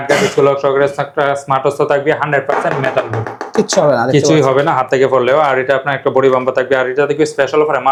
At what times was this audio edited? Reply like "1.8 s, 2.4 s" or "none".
none